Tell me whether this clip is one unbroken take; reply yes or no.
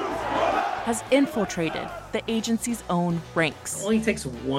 yes